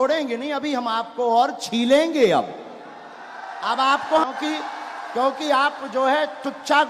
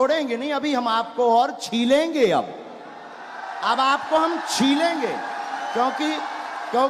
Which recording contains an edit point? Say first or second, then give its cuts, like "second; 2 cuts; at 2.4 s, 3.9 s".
first; 1 cut; at 4.3 s